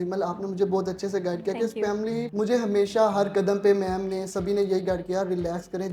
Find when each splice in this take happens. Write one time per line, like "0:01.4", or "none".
0:02.2